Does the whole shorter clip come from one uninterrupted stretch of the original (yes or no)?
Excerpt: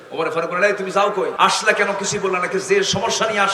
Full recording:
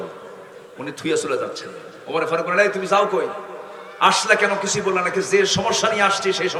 no